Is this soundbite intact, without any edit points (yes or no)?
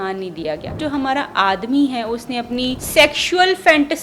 no